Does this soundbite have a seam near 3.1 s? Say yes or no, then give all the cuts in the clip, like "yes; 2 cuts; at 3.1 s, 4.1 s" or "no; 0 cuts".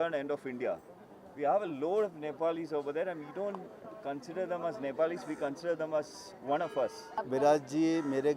no; 1 cut; at 7.2 s